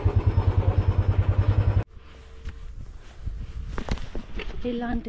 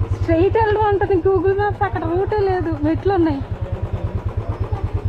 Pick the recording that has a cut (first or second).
first